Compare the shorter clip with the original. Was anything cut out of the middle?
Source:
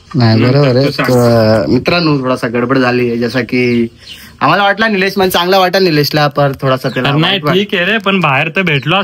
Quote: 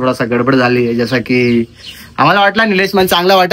no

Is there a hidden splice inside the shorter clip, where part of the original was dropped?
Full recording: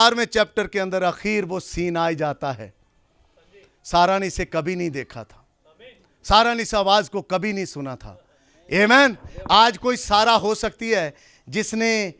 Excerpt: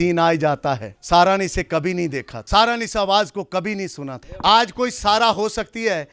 yes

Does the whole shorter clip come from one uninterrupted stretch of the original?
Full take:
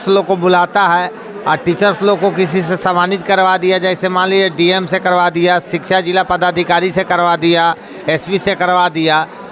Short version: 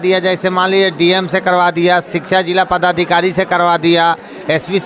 yes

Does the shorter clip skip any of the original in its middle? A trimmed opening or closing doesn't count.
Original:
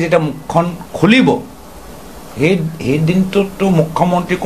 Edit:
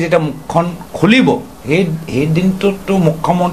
yes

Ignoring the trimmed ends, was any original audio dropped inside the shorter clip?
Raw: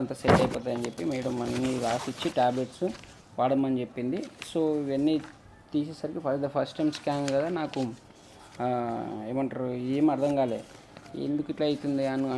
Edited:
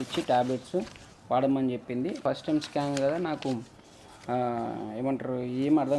yes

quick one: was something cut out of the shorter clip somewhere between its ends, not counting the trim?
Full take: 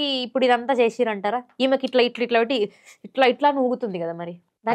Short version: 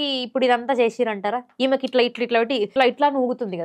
yes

